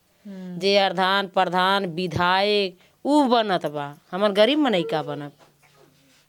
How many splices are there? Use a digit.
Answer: 0